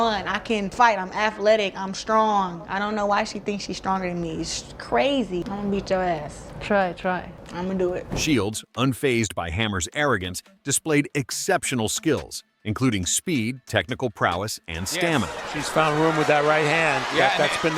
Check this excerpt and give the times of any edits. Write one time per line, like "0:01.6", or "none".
0:05.4